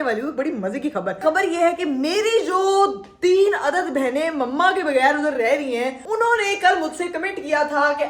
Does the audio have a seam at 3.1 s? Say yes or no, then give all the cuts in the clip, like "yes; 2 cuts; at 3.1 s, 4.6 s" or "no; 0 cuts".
no; 2 cuts; at 1.2 s, 6.0 s